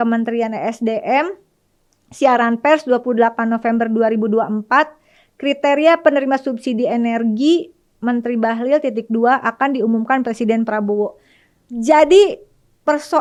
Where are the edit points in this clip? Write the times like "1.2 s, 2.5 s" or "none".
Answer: none

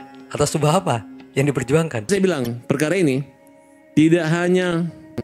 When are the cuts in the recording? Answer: 2.1 s

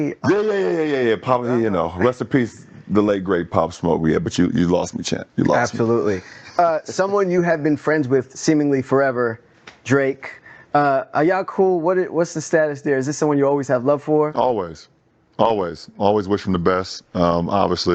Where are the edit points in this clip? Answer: 1.4 s

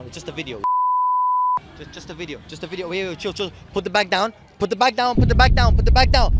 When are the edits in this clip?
none

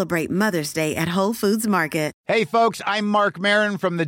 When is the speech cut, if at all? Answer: 2.2 s

